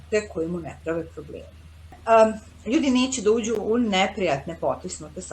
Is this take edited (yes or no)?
yes